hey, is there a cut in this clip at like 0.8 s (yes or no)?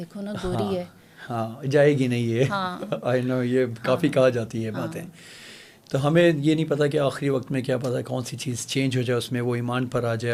no